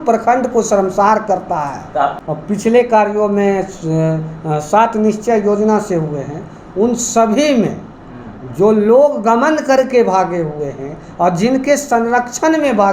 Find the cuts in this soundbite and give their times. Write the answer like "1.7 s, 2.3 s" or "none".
2.2 s